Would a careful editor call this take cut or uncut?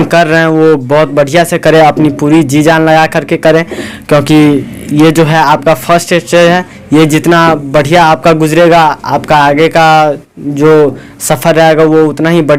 uncut